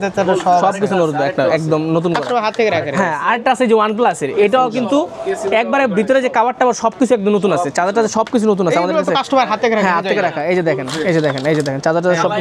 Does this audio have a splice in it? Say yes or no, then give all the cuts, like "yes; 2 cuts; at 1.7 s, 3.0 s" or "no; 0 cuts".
no; 0 cuts